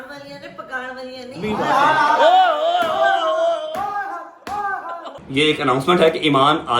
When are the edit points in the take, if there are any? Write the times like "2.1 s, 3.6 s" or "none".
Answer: 5.1 s